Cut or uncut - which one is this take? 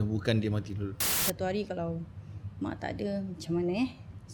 cut